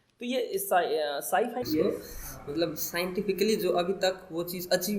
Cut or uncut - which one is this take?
cut